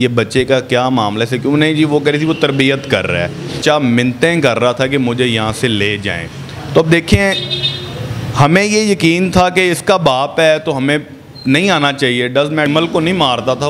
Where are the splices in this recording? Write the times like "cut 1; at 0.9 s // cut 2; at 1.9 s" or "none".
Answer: cut 1; at 3.6 s // cut 2; at 12.7 s